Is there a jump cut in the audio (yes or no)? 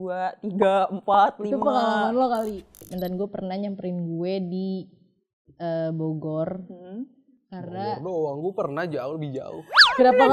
yes